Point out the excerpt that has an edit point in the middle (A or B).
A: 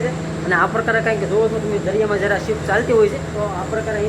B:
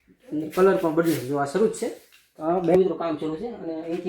B